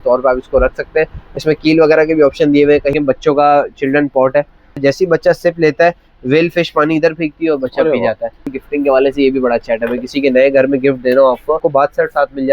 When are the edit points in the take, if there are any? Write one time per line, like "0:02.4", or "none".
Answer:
0:02.9
0:04.8
0:08.5
0:11.6